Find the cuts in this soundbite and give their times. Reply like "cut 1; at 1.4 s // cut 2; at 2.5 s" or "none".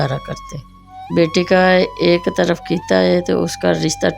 cut 1; at 0.9 s